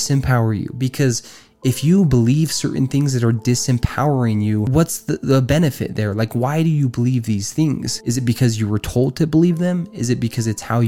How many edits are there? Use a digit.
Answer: 2